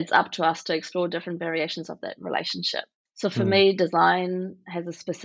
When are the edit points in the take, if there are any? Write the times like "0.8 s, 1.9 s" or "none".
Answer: 3.0 s